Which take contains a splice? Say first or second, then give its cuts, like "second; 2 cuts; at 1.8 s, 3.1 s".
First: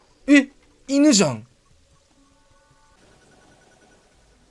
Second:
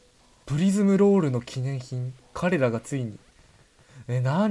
first; 1 cut; at 3.0 s